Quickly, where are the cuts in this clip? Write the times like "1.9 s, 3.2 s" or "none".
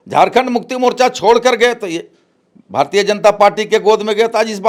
none